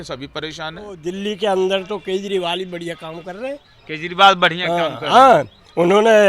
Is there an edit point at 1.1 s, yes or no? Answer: yes